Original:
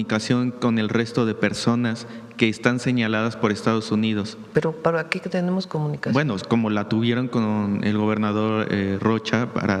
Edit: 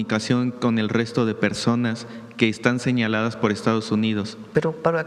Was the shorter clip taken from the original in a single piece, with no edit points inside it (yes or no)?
yes